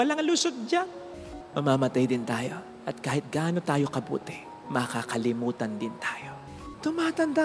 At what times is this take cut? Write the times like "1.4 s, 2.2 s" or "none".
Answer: 1.2 s, 6.6 s

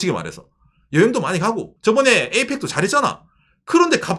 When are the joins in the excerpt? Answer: 1.7 s

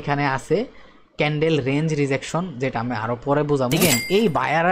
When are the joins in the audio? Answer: 3.8 s

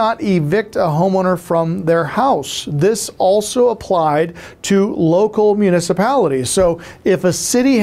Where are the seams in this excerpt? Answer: none

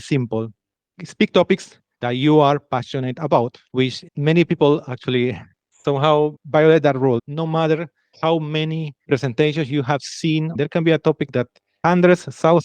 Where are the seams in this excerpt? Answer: 3.6 s, 7.3 s, 10.5 s

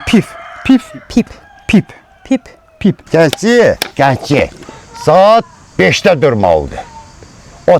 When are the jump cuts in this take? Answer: 3.0 s

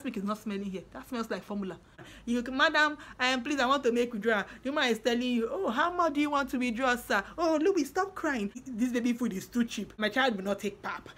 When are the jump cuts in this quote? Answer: 2.1 s, 8.6 s, 10.0 s

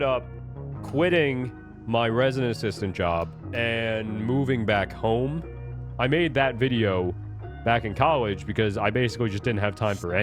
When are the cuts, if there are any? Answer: 3.4 s, 5.8 s

